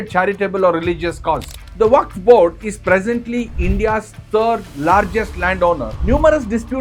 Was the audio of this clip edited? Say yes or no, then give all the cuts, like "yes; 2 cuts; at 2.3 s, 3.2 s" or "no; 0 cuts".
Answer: yes; 2 cuts; at 1.5 s, 5.9 s